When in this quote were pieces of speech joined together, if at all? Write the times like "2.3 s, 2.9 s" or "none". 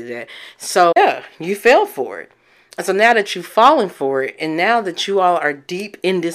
1.0 s